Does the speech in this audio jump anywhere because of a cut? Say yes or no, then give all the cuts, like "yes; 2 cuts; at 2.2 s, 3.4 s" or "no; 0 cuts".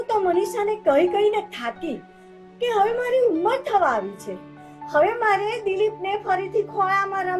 no; 0 cuts